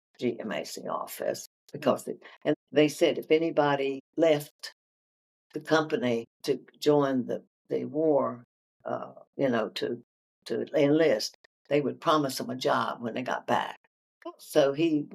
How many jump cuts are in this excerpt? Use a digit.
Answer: 3